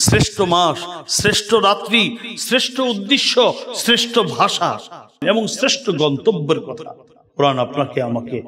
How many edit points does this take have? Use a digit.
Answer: 1